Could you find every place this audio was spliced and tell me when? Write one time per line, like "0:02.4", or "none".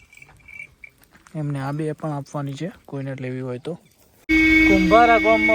0:04.2